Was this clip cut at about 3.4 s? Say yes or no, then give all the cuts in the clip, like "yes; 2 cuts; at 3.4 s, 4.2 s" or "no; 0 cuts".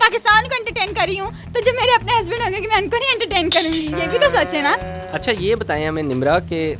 no; 1 cut; at 5.0 s